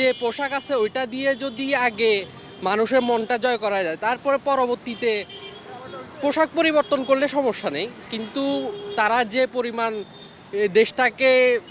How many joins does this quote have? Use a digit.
0